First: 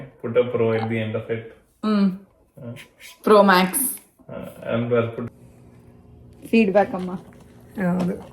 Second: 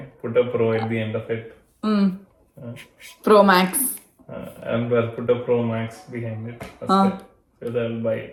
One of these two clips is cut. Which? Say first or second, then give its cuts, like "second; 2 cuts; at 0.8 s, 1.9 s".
first; 1 cut; at 5.2 s